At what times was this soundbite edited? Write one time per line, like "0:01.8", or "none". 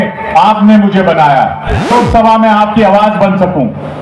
0:01.9